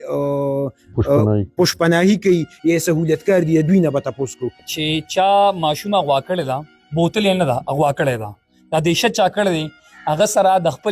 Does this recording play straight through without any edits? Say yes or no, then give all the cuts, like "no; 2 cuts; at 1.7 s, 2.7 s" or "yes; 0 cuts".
no; 1 cut; at 4.6 s